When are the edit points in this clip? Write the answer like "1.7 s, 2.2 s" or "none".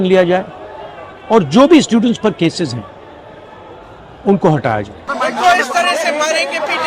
5.0 s